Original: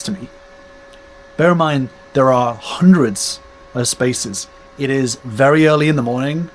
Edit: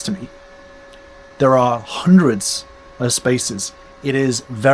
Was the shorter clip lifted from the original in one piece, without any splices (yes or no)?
no